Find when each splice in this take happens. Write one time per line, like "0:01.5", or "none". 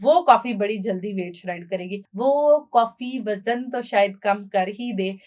0:02.0